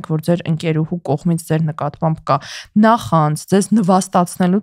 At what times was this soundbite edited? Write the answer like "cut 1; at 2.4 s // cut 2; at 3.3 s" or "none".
none